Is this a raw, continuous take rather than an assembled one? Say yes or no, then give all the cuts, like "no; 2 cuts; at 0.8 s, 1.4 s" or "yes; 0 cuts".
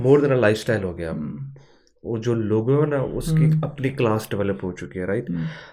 yes; 0 cuts